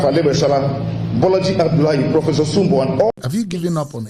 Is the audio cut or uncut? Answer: cut